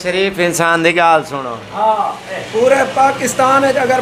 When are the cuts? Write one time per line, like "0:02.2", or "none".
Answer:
none